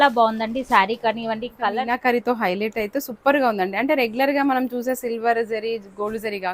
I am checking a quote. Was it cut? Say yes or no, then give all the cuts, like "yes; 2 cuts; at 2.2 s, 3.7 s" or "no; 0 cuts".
yes; 1 cut; at 1.7 s